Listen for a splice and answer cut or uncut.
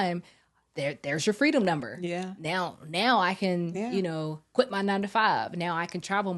uncut